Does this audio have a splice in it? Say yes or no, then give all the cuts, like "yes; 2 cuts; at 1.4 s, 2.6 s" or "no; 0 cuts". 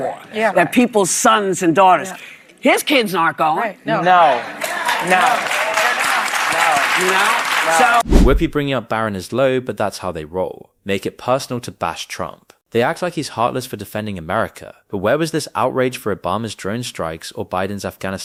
no; 0 cuts